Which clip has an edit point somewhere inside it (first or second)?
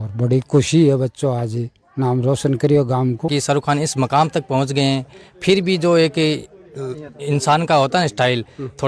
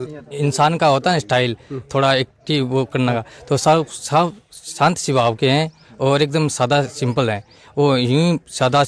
first